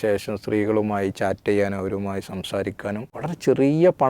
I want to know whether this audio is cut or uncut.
cut